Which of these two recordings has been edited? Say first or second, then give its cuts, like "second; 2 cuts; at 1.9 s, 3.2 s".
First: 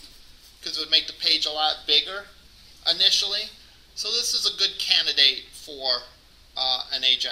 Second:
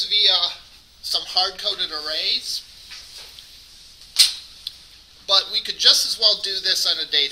second; 1 cut; at 2.7 s